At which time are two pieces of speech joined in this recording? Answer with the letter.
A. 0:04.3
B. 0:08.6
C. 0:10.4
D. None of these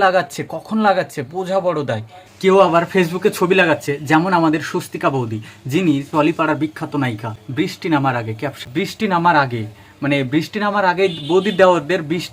B